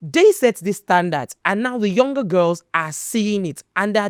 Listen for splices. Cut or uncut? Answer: uncut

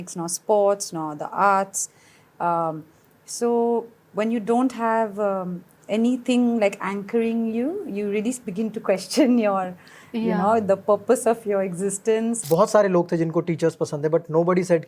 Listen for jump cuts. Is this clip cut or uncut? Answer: cut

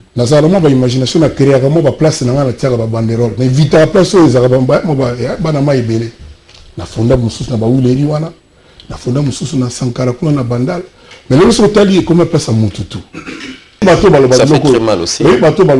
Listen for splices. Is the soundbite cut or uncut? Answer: cut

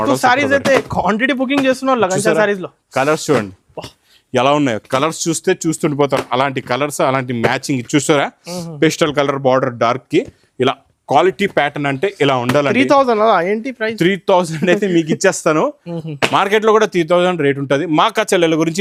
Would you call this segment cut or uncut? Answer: uncut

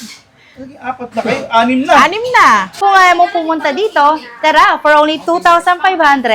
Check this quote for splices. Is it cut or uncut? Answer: cut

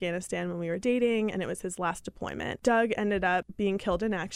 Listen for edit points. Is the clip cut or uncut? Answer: cut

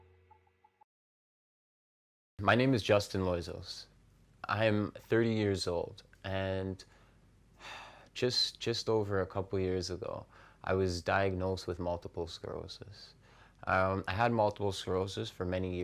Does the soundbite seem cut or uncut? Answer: uncut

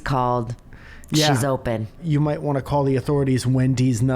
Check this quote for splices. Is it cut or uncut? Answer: cut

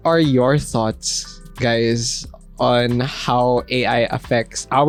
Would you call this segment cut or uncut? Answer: uncut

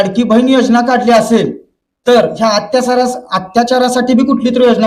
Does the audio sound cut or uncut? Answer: uncut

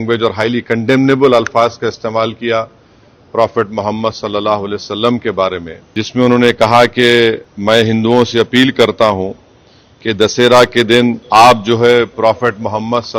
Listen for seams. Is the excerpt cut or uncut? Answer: cut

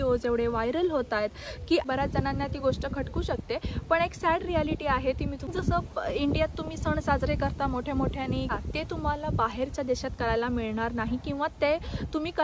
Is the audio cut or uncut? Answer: cut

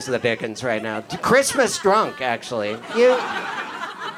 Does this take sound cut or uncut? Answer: uncut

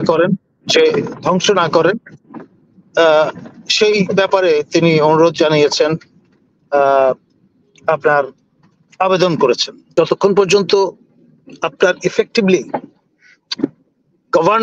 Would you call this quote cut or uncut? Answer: cut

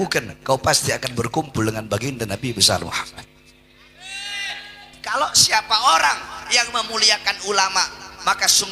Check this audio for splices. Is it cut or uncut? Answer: cut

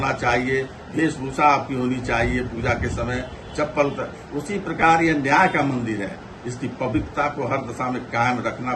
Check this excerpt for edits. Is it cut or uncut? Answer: uncut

